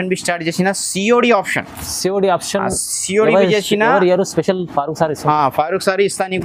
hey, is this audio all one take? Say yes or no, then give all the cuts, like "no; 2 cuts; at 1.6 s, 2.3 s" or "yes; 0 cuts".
yes; 0 cuts